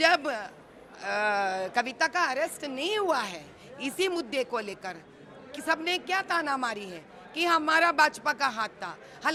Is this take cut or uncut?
uncut